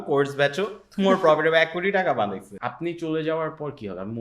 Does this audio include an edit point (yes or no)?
yes